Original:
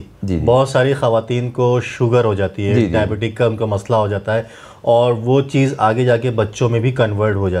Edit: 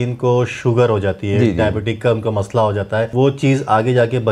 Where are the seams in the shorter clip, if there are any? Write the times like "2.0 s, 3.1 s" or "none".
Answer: 3.1 s